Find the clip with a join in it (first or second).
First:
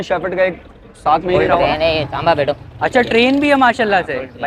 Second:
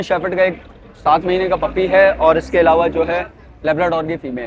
first